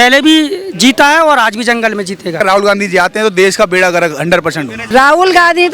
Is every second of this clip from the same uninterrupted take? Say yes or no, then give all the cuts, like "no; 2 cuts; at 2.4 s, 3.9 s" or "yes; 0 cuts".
no; 2 cuts; at 2.4 s, 4.7 s